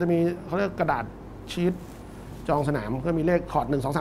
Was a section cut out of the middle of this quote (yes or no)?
no